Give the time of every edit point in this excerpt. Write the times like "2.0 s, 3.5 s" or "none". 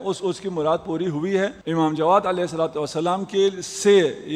1.6 s